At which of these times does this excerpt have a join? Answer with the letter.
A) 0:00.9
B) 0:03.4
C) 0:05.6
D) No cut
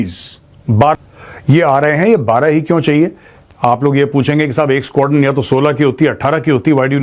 A